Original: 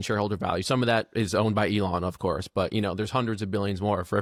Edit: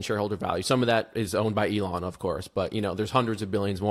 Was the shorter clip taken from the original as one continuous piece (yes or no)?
yes